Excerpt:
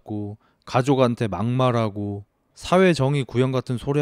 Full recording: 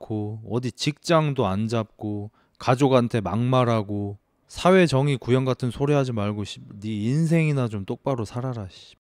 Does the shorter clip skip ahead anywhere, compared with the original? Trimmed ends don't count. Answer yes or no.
no